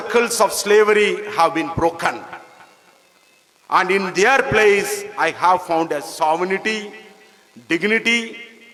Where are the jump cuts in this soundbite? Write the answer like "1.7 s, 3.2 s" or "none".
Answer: none